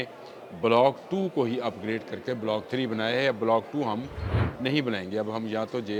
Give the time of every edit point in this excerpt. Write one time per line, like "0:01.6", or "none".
none